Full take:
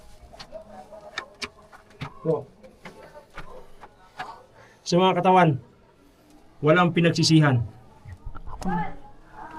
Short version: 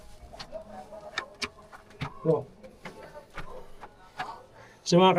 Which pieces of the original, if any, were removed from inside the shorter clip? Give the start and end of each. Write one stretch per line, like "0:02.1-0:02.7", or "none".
none